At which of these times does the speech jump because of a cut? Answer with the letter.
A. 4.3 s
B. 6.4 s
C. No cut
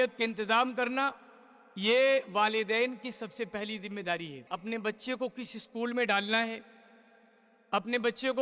A